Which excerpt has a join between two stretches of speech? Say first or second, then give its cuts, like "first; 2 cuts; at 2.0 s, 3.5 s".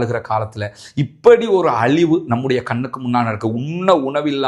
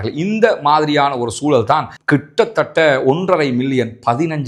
second; 1 cut; at 2.0 s